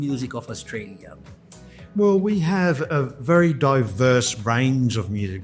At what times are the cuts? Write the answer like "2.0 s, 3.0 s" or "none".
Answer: none